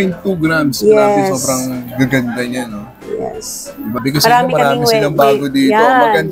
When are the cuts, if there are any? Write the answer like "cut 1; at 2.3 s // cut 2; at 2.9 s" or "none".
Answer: cut 1; at 4.0 s